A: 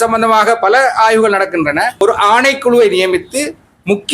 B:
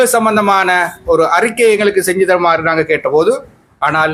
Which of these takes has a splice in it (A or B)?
A